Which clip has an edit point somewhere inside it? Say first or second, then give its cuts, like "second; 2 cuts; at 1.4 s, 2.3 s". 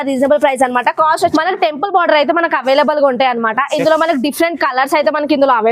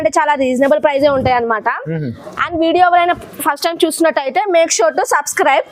first; 1 cut; at 1.3 s